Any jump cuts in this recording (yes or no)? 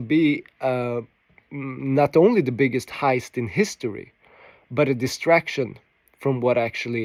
no